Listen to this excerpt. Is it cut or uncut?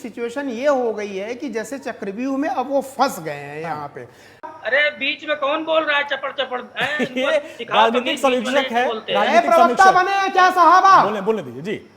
cut